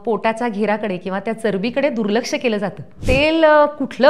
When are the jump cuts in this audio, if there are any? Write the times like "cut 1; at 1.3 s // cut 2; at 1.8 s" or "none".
cut 1; at 2.9 s